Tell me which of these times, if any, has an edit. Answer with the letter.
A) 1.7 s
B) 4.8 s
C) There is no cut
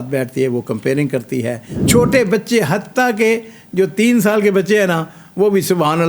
A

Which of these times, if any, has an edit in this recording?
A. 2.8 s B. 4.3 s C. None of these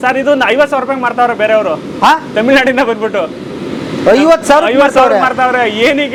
C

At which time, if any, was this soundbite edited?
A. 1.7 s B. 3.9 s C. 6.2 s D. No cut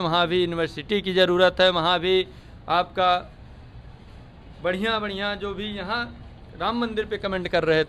D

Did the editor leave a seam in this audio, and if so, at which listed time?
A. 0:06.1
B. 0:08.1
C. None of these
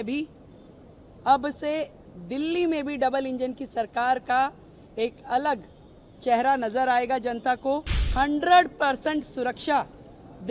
B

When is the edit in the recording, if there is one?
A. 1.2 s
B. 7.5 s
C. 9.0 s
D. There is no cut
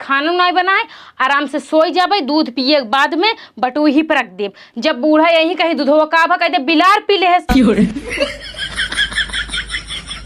B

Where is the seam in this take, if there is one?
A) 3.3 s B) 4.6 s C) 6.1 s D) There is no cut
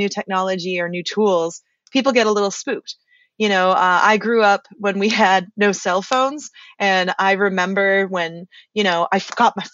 D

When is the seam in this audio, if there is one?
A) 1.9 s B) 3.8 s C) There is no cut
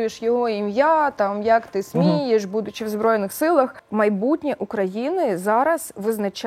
B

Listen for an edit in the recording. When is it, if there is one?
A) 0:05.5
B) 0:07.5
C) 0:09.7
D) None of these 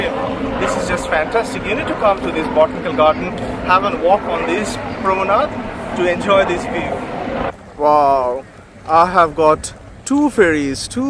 B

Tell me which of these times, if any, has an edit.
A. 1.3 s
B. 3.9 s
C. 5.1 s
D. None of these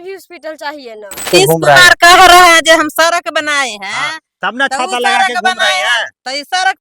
A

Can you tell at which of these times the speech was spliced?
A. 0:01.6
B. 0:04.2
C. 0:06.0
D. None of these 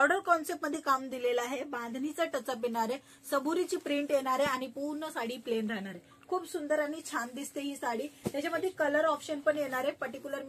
D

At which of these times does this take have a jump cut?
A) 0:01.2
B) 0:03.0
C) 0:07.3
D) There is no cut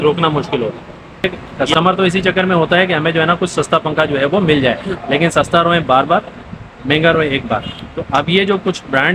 A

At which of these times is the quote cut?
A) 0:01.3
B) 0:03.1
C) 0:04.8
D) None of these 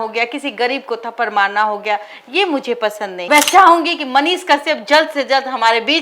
B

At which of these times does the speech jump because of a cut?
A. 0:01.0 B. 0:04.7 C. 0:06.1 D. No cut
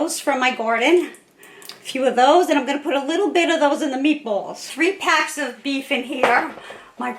B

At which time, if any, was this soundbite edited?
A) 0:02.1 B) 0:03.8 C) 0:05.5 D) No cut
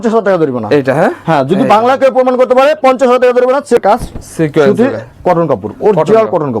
B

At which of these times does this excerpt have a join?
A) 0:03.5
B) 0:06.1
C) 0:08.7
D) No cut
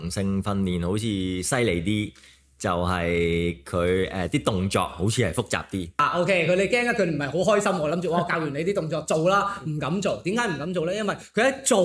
B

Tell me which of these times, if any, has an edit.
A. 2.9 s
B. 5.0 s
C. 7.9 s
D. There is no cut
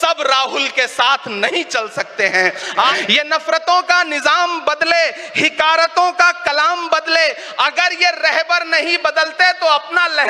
A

